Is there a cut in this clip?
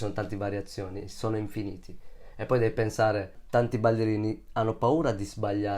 yes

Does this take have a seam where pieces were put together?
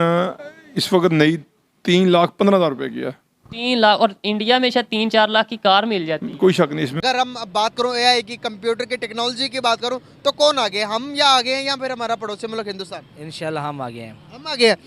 yes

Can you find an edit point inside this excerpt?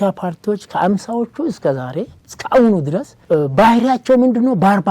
yes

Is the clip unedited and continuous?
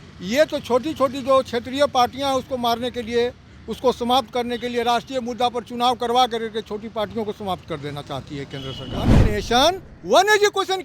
no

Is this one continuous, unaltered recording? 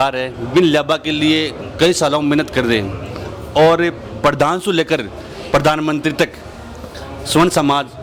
yes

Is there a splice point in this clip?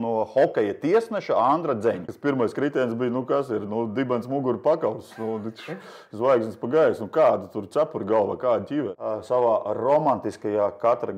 yes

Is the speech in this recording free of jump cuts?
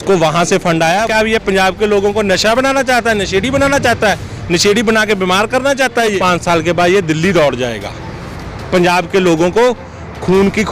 no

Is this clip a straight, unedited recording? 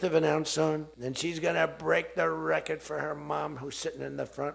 no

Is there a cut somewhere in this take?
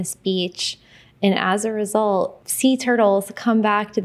yes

